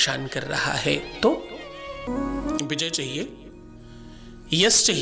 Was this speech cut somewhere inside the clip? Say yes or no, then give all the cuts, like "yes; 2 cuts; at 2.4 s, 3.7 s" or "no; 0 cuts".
yes; 1 cut; at 2.0 s